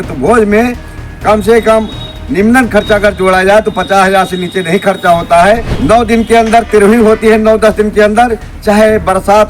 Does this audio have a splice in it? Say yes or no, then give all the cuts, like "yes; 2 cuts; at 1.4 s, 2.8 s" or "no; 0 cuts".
yes; 1 cut; at 5.7 s